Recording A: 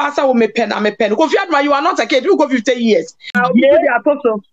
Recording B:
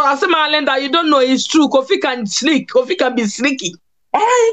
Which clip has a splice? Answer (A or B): A